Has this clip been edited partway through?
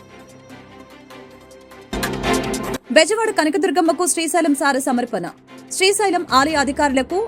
yes; 2 cuts; at 1.7 s, 2.8 s

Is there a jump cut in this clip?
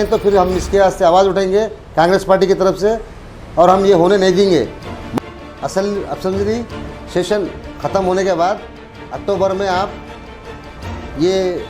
yes; 1 cut; at 5.0 s

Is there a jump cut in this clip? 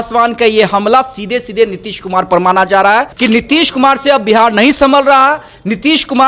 yes; 1 cut; at 3.1 s

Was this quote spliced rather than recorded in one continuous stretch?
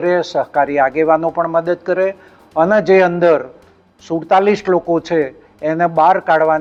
no; 0 cuts

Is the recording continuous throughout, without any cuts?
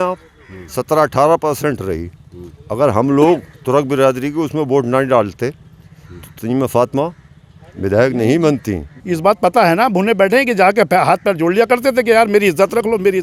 no; 1 cut; at 9.0 s

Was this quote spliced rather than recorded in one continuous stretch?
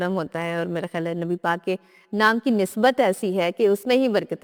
no; 0 cuts

